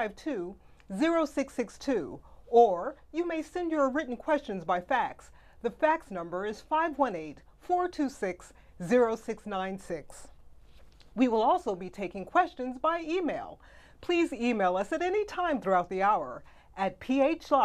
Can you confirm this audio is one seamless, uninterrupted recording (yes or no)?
no